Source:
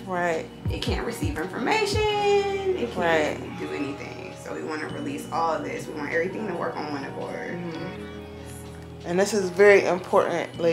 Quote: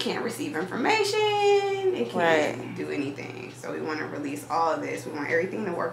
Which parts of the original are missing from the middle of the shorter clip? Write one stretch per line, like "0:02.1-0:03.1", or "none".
none